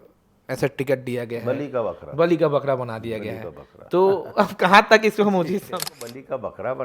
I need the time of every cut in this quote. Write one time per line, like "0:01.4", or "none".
0:05.7